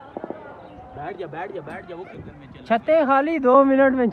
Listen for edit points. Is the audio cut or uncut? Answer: uncut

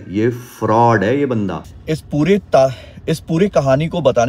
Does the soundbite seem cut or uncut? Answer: uncut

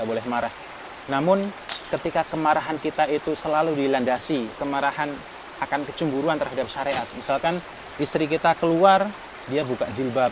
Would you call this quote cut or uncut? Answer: uncut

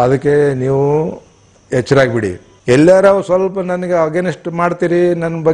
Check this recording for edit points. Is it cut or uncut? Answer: cut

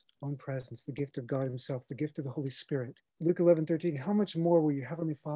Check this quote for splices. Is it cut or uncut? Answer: cut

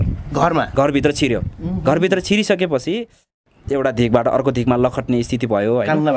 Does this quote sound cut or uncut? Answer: cut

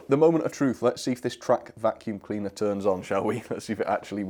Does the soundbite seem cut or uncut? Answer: uncut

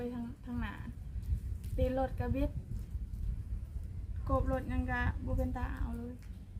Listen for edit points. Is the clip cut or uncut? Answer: uncut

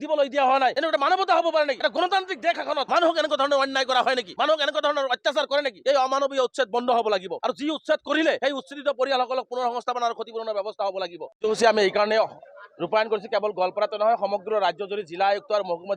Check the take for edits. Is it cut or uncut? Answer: cut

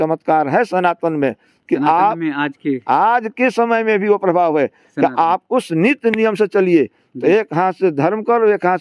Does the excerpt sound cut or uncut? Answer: uncut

